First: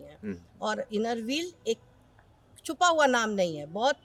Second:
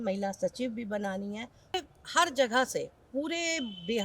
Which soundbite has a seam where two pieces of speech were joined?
second; 1 cut; at 1.7 s

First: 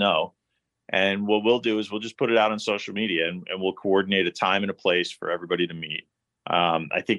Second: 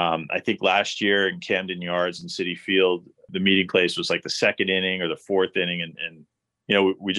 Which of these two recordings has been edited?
second; 1 cut; at 3.3 s

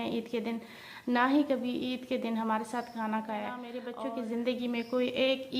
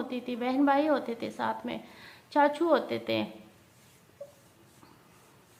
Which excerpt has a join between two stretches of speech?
first; 1 cut; at 3.8 s

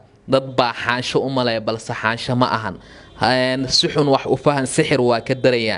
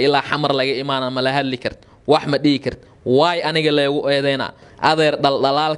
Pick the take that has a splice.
second; 1 cut; at 4.6 s

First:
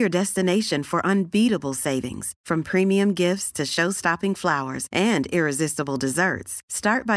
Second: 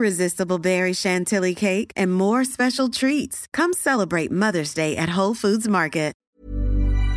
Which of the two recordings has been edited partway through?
second; 1 cut; at 6.2 s

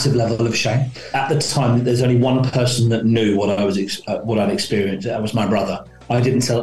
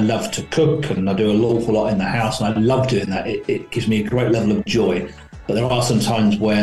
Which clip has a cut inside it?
first; 1 cut; at 1.1 s

